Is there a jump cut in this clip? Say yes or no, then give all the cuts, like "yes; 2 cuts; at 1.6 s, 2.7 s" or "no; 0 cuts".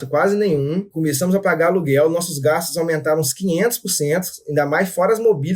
yes; 1 cut; at 0.9 s